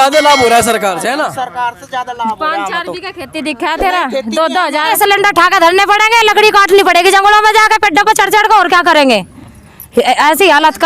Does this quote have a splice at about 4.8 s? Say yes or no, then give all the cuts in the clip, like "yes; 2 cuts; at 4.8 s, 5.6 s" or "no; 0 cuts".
yes; 1 cut; at 4.8 s